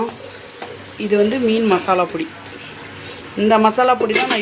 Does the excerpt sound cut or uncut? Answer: uncut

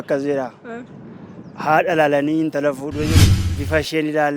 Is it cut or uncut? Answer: cut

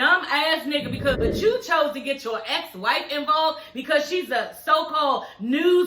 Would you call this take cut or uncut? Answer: cut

